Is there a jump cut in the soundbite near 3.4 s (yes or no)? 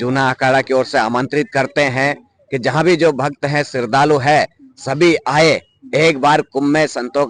no